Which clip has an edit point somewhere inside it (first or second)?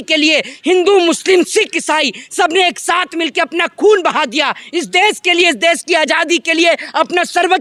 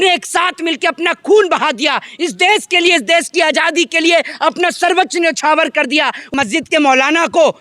second